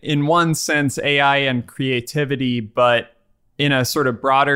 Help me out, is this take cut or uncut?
uncut